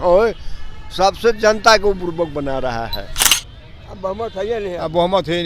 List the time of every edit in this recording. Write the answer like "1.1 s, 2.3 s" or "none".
3.2 s